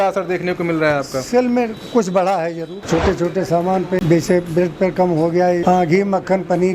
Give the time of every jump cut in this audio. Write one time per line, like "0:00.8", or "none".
0:02.7
0:04.0
0:05.6